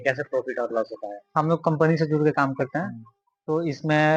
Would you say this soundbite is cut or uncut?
uncut